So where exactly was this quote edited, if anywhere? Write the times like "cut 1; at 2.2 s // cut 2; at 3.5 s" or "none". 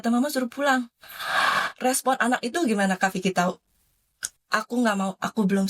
none